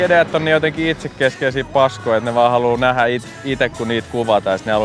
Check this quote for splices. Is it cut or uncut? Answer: uncut